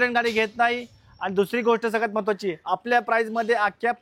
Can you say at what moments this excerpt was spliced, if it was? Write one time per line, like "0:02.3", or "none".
none